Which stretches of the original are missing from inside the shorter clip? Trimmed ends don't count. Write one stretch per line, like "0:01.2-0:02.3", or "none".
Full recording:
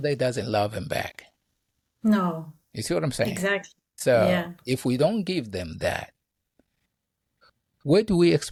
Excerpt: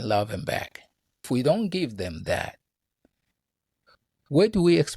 0:01.7-0:04.8